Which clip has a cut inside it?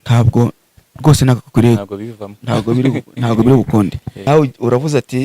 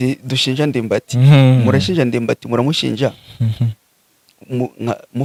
first; 1 cut; at 4.1 s

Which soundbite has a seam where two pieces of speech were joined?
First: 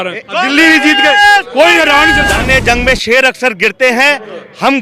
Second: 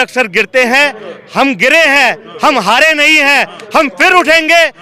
first; 1 cut; at 2.3 s

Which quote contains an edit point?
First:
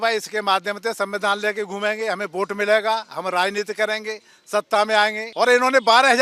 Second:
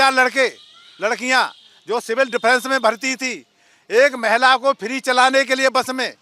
first; 1 cut; at 5.2 s

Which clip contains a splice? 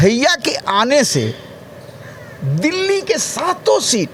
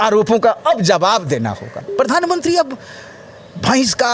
second; 1 cut; at 1.9 s

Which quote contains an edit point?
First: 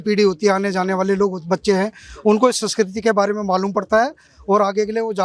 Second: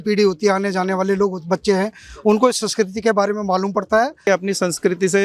second; 1 cut; at 4.3 s

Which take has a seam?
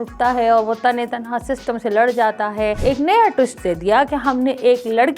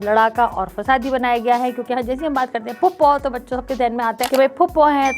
first; 1 cut; at 2.8 s

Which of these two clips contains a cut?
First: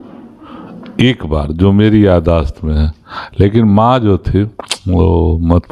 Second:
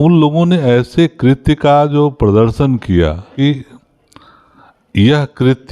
second; 1 cut; at 3.3 s

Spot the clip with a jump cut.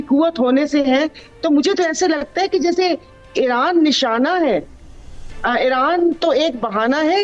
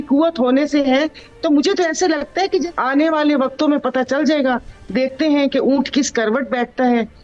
second; 1 cut; at 2.7 s

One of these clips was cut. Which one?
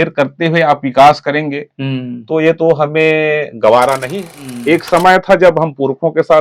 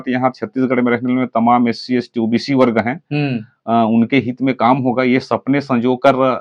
first; 1 cut; at 4.0 s

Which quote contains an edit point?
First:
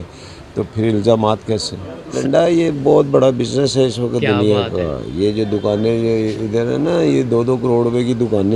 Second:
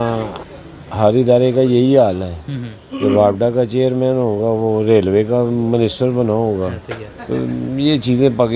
first; 1 cut; at 2.1 s

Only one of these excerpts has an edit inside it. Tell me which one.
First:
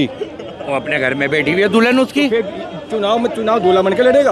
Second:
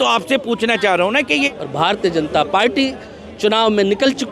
second; 1 cut; at 1.5 s

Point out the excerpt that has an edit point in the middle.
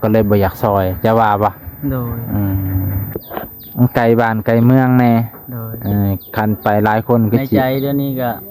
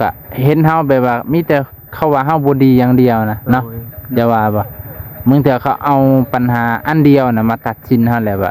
first; 1 cut; at 3.2 s

